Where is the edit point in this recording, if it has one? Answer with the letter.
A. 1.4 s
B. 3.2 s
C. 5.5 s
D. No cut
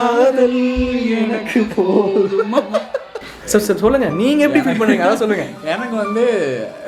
D